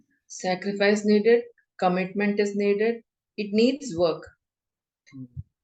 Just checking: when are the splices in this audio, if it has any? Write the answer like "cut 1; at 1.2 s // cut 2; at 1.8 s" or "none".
none